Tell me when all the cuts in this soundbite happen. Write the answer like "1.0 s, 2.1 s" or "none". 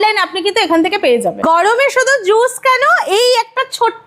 1.4 s